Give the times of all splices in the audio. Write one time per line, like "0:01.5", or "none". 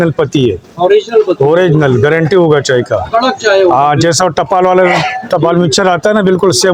none